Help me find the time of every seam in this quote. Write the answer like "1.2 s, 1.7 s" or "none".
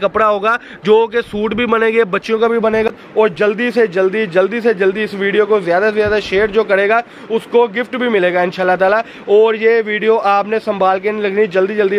2.9 s